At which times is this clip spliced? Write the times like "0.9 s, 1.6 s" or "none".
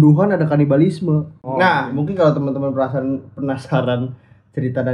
1.5 s